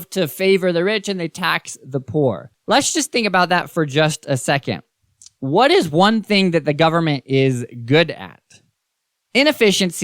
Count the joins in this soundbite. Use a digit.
1